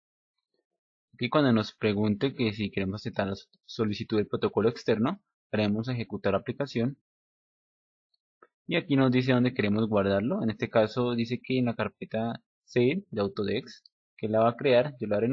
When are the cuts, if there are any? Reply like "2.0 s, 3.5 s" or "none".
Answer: 4.8 s